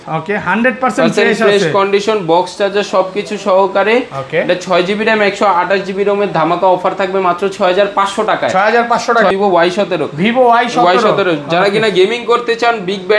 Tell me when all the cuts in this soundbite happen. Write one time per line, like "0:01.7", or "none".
0:09.3